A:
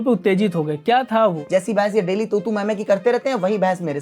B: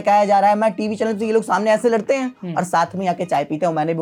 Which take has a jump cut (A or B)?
A